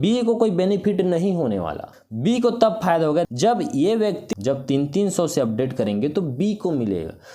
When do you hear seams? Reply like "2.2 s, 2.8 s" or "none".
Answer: 1.9 s, 3.3 s, 4.3 s